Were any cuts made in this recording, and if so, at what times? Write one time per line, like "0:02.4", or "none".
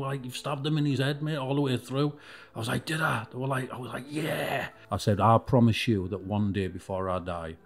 0:04.8